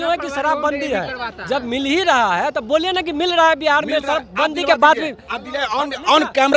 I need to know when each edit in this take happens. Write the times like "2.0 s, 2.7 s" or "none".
none